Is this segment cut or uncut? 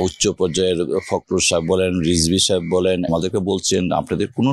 cut